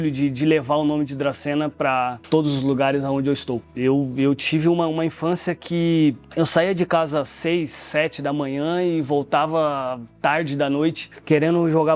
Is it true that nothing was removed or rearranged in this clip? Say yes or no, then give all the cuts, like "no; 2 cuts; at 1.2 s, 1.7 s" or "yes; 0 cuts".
no; 2 cuts; at 2.2 s, 3.7 s